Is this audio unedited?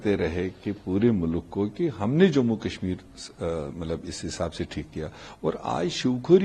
yes; 0 cuts

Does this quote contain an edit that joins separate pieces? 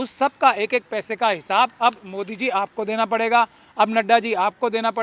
no; 0 cuts

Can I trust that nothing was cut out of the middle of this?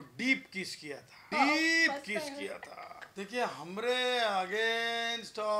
no; 2 cuts; at 1.3 s, 2.9 s

